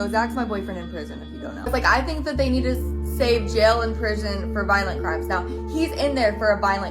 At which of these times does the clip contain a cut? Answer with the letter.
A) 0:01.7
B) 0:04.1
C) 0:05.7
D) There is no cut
A